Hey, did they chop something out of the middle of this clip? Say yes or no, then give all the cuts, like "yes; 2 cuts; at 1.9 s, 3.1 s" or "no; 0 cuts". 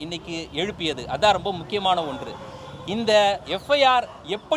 no; 0 cuts